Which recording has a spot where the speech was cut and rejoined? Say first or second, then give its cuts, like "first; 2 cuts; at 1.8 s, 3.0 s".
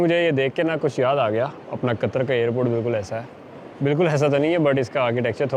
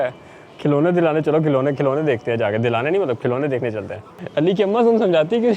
second; 1 cut; at 4.1 s